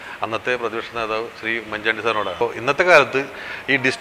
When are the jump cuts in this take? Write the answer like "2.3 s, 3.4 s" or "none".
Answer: 2.4 s